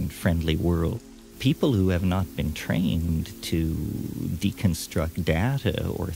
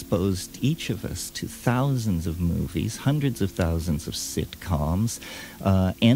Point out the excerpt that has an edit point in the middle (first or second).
first